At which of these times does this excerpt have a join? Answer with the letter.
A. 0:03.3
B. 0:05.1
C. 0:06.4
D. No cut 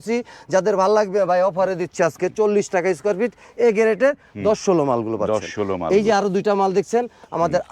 D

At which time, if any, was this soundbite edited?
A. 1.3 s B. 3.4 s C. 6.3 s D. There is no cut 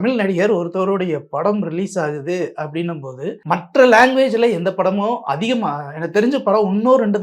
B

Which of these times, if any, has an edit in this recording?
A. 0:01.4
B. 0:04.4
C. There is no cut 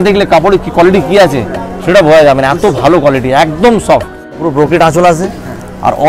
B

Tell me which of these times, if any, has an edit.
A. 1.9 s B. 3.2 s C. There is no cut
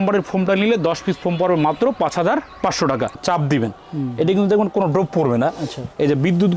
B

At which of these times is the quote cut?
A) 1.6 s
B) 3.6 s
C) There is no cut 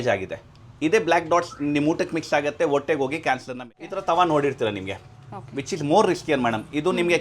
B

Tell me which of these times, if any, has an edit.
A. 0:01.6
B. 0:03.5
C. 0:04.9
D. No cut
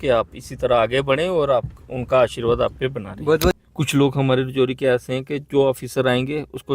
B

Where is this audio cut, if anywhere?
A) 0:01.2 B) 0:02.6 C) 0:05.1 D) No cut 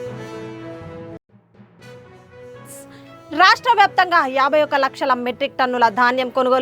B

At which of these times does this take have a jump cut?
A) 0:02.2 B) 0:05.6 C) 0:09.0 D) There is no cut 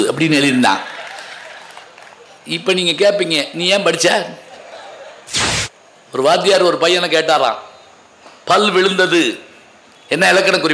B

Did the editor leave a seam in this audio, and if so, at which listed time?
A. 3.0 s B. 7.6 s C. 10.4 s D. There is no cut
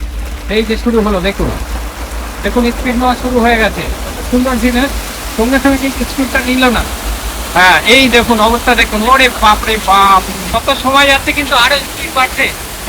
C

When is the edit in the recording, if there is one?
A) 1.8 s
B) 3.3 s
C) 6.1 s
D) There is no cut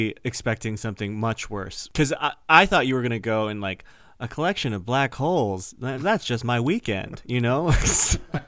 A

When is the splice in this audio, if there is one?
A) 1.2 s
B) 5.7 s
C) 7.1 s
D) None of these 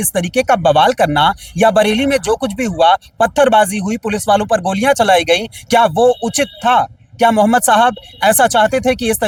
D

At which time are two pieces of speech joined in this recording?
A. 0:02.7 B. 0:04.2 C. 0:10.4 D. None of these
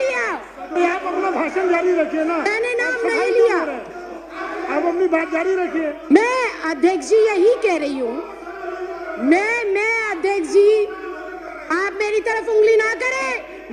D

